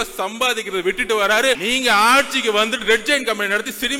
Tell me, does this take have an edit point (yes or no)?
yes